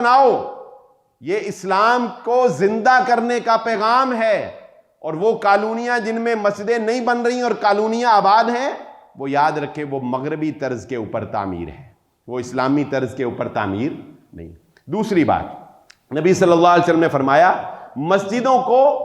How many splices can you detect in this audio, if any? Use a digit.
0